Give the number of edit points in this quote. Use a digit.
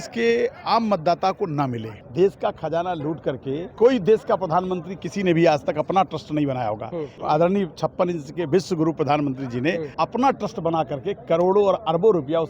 4